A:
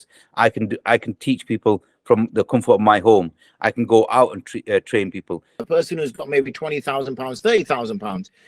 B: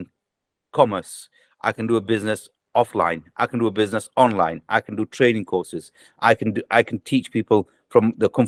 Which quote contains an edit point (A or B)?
A